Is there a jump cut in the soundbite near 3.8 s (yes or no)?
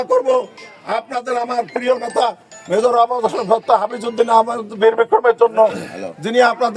no